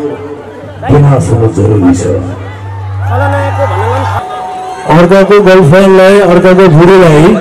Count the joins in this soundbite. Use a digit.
1